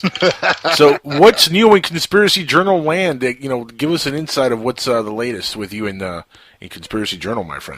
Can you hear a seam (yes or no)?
yes